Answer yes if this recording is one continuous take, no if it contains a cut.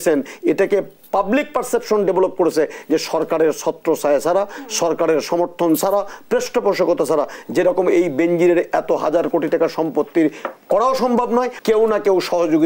no